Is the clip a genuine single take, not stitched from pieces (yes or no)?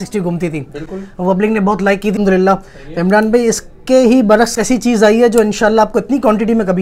yes